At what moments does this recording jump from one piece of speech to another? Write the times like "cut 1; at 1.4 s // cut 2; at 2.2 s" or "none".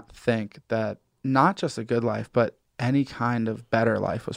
cut 1; at 1.1 s